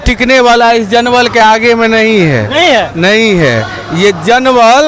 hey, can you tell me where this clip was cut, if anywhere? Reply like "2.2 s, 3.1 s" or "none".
none